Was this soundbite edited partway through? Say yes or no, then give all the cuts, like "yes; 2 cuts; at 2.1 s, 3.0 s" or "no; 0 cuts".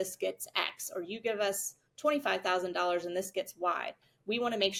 no; 0 cuts